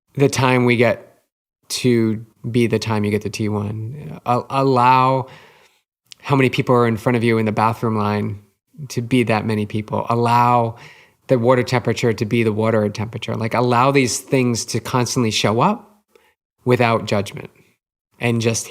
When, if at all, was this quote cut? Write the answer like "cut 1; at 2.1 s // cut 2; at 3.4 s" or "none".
cut 1; at 2.3 s